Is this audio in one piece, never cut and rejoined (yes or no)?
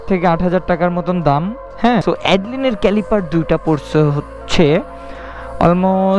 no